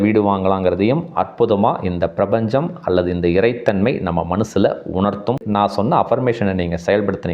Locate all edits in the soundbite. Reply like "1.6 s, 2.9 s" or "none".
5.4 s